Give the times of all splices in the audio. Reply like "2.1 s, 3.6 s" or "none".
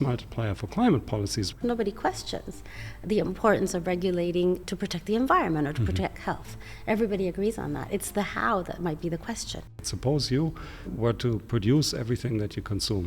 1.6 s, 4.7 s, 9.9 s, 10.9 s